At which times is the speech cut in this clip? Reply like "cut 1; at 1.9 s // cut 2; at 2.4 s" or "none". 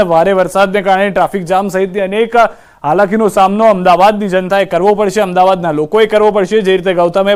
cut 1; at 5.1 s